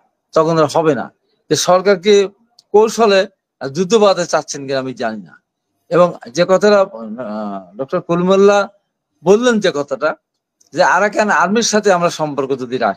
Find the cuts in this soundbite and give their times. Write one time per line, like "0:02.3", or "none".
none